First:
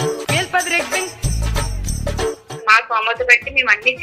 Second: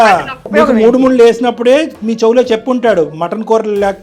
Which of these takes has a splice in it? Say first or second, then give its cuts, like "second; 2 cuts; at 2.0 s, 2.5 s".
first; 1 cut; at 2.5 s